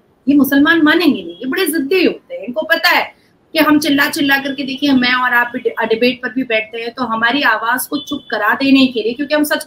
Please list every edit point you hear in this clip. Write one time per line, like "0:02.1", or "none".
none